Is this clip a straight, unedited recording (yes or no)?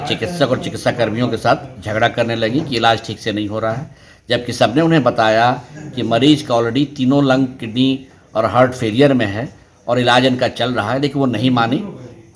yes